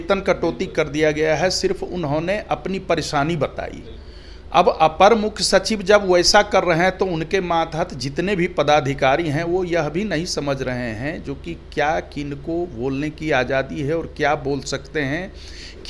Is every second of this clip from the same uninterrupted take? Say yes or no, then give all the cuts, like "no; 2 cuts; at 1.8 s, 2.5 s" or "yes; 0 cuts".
yes; 0 cuts